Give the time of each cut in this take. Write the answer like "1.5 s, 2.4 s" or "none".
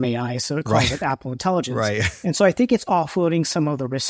none